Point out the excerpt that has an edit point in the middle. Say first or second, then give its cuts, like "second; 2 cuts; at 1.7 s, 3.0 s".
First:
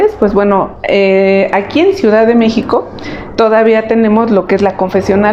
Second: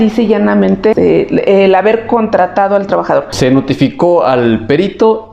second; 2 cuts; at 0.9 s, 3.3 s